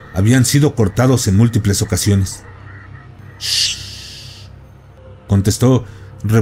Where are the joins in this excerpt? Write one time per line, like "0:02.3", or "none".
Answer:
0:03.2
0:05.0